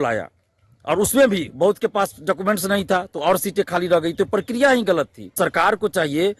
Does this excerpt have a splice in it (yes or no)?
yes